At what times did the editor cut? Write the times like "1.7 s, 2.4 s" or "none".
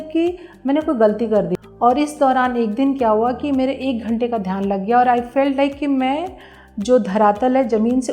1.5 s